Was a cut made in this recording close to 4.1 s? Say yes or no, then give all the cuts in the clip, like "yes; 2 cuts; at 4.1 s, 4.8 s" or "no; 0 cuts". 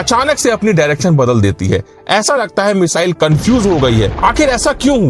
yes; 1 cut; at 4.1 s